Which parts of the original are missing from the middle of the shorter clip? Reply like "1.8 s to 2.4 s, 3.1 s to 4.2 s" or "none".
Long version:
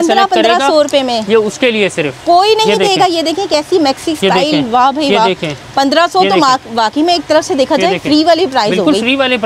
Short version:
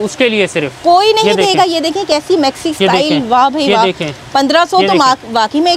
none